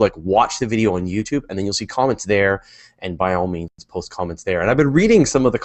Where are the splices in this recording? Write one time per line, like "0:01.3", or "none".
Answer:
none